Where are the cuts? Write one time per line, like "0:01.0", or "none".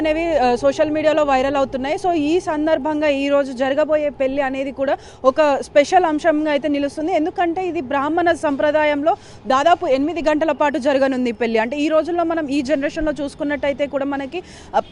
none